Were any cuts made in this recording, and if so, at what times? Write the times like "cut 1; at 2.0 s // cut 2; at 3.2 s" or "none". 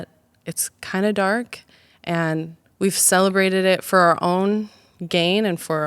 cut 1; at 2.6 s